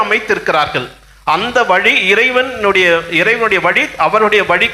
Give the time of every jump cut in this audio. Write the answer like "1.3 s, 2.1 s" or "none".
none